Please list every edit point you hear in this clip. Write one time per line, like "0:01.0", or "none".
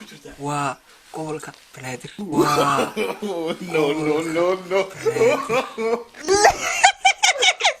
0:02.1
0:06.3